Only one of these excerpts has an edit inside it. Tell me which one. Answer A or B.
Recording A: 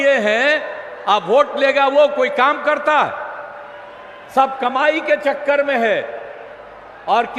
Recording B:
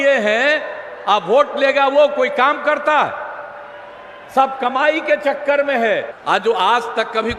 B